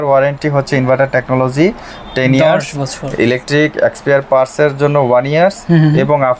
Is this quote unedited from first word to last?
yes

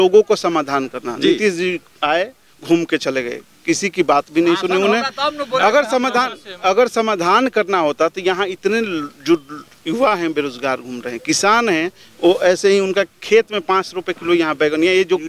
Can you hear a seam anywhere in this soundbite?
no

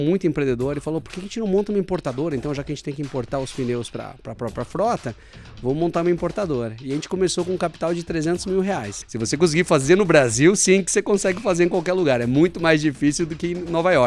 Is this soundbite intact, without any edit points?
no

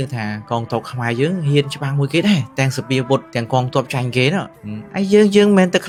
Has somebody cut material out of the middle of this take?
no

